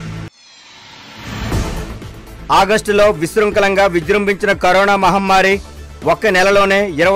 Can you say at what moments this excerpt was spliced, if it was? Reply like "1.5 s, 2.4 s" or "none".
none